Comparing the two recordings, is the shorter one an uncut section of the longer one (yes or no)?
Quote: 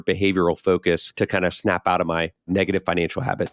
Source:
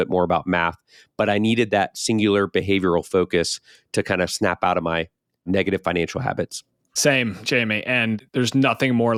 no